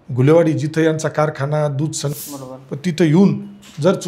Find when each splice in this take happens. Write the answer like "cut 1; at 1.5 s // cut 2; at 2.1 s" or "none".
cut 1; at 2.1 s